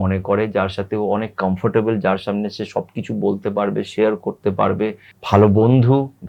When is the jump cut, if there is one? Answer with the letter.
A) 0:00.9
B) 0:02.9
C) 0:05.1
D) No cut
C